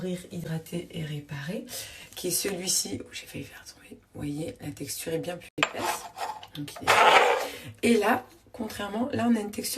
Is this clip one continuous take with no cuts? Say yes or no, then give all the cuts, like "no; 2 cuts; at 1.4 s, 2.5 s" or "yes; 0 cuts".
no; 1 cut; at 5.5 s